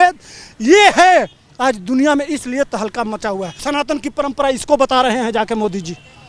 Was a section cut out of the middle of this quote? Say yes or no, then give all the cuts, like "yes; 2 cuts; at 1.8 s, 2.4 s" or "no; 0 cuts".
yes; 1 cut; at 3.6 s